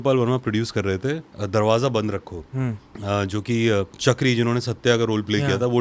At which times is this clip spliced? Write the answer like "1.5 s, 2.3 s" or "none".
1.3 s, 2.9 s, 3.9 s